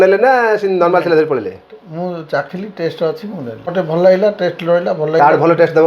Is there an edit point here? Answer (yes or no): yes